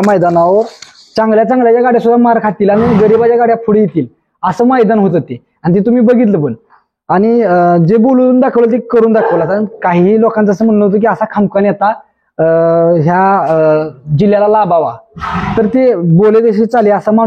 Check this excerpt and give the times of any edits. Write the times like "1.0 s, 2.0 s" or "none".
none

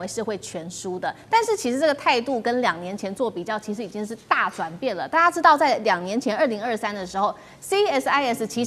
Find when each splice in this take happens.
none

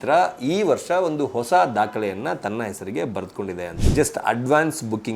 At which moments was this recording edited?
3.7 s

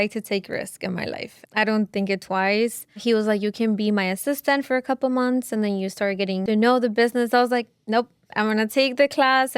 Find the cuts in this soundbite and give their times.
1.3 s, 6.4 s

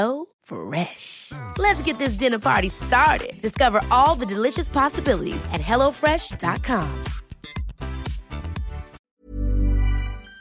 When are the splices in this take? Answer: 8.9 s

